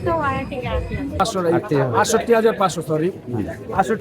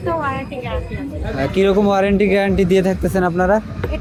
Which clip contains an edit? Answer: first; 1 cut; at 1.2 s

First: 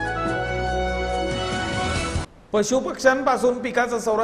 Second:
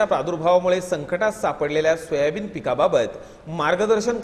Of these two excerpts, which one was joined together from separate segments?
first; 1 cut; at 2.2 s

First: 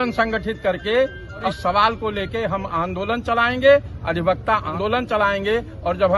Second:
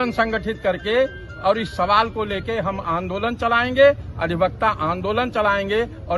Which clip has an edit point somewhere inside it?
first; 2 cuts; at 1.4 s, 4.7 s

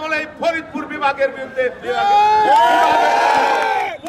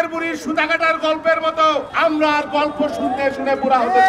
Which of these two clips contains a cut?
second; 1 cut; at 1.9 s

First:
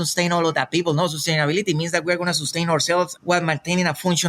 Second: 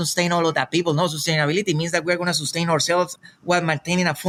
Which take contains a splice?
first; 1 cut; at 3.2 s

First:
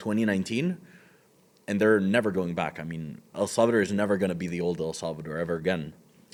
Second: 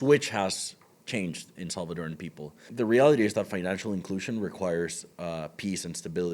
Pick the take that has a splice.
second; 1 cut; at 2.6 s

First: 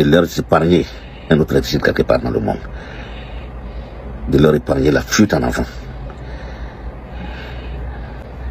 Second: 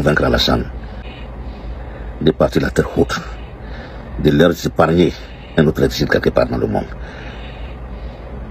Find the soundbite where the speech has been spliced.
second; 1 cut; at 1.0 s

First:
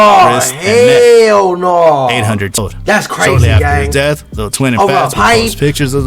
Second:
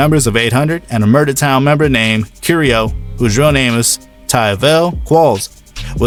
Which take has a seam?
first; 1 cut; at 2.6 s

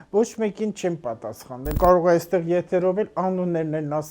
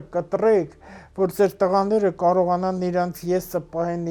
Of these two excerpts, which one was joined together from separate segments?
first; 1 cut; at 1.7 s

